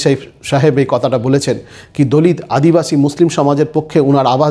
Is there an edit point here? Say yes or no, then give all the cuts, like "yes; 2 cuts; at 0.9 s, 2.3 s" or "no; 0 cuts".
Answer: no; 0 cuts